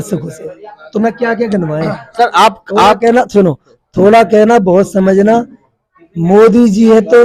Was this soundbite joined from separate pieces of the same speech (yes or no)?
no